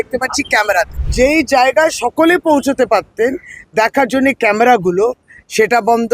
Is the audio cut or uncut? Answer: cut